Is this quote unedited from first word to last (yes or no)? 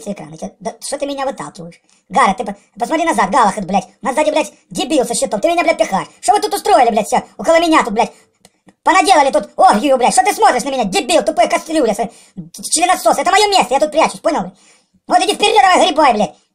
yes